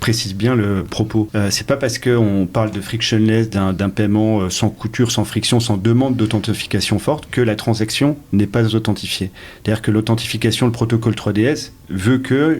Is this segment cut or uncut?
cut